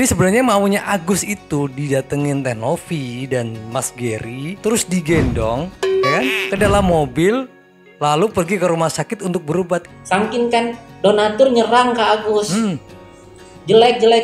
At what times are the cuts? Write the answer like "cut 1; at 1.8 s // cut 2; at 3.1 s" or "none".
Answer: cut 1; at 9.9 s